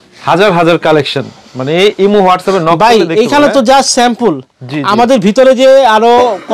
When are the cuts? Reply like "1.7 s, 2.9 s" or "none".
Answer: none

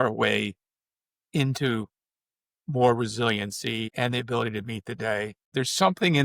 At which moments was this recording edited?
3.9 s, 5.4 s

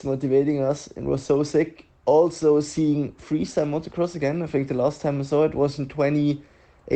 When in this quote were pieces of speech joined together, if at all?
none

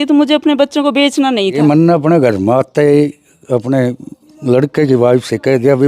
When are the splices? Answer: 1.6 s

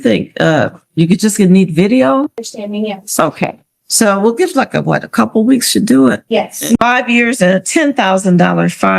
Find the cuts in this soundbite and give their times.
6.7 s

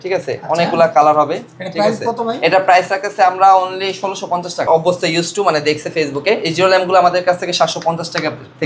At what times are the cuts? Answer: 4.6 s

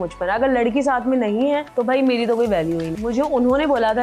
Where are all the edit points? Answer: 1.7 s, 2.9 s

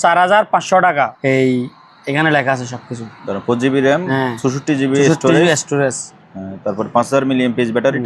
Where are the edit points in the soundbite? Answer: 1.1 s

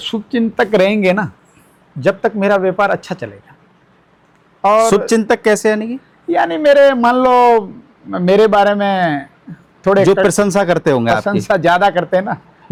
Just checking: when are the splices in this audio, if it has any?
none

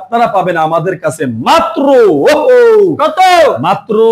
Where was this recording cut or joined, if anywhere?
none

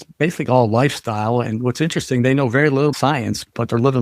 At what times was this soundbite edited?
2.9 s

